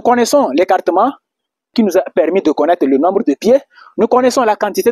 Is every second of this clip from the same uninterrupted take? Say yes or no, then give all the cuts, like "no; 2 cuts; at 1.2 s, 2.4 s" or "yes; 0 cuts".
no; 1 cut; at 1.7 s